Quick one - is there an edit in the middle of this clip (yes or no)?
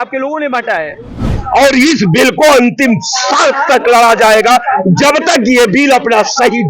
yes